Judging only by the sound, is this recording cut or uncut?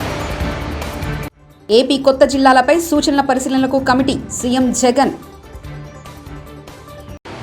uncut